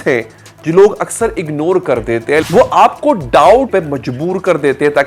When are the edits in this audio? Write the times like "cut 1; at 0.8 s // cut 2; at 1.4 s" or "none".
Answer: cut 1; at 2.5 s // cut 2; at 3.7 s